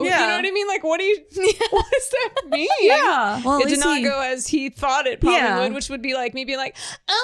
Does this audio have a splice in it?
yes; 1 cut; at 3.4 s

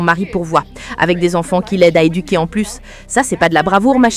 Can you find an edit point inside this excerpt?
no; 0 cuts

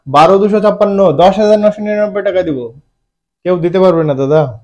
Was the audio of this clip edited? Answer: no; 0 cuts

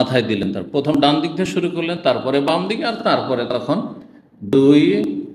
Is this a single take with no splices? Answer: yes; 0 cuts

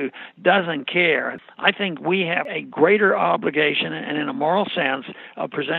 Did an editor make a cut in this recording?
yes; 2 cuts; at 1.3 s, 2.4 s

